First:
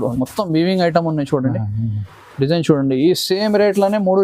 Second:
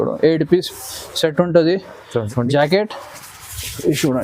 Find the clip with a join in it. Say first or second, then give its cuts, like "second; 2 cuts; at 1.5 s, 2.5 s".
second; 1 cut; at 2.3 s